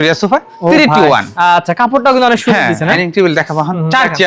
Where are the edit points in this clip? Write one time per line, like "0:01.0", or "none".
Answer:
0:03.0